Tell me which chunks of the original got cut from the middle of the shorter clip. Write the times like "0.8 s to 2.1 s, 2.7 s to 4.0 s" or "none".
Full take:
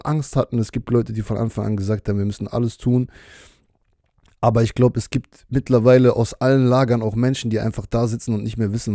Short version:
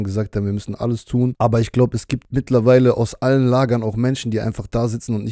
3.1 s to 4.4 s, 5.2 s to 5.4 s